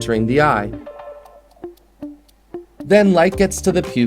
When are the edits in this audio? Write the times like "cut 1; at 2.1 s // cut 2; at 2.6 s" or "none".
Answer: cut 1; at 1.0 s